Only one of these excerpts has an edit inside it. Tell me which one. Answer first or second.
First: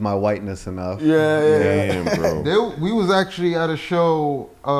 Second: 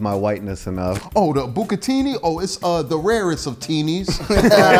second